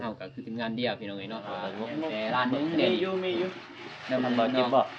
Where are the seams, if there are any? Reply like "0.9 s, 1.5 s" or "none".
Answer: 1.6 s